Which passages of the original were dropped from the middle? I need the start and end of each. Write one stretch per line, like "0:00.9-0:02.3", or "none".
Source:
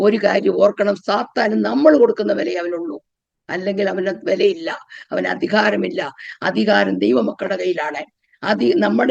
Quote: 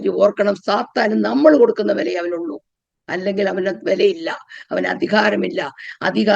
none